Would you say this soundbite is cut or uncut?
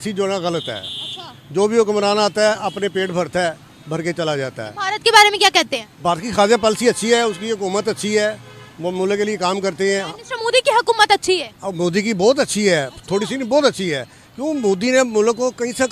uncut